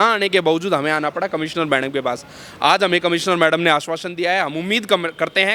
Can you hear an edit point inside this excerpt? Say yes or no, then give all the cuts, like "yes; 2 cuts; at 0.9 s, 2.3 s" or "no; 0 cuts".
no; 0 cuts